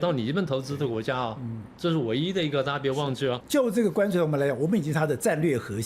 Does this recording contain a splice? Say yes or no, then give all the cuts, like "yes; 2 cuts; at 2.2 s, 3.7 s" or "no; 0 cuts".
yes; 1 cut; at 3.4 s